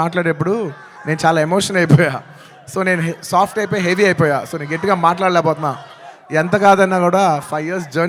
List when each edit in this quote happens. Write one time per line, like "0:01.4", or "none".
none